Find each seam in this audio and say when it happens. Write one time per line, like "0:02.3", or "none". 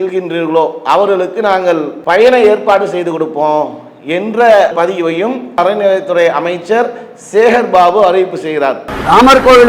none